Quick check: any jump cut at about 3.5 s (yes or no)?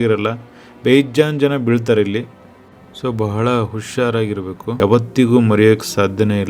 no